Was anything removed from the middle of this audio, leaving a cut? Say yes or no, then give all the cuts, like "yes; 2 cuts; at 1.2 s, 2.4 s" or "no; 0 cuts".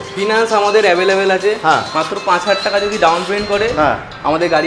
no; 0 cuts